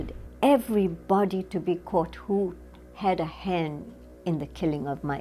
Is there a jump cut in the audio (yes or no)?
no